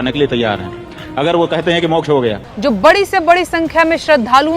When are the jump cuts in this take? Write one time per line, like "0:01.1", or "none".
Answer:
0:02.5